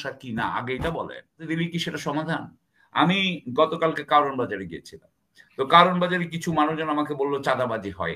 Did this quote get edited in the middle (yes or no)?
yes